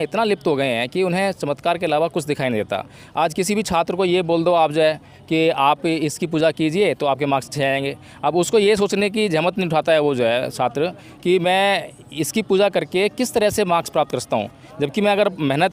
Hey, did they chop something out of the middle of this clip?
no; 0 cuts

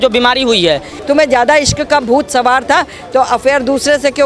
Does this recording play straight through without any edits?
no; 1 cut; at 0.9 s

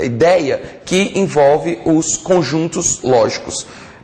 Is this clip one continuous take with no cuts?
yes; 0 cuts

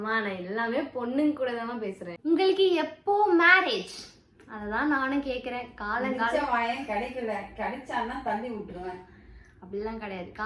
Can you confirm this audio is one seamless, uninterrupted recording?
no; 1 cut; at 2.1 s

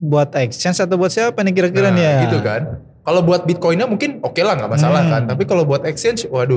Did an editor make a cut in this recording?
no; 0 cuts

